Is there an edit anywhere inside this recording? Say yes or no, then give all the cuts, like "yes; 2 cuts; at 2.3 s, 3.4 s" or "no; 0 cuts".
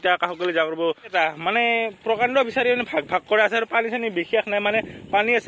yes; 1 cut; at 1.1 s